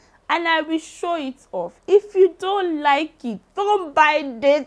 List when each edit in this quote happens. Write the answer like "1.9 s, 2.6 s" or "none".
none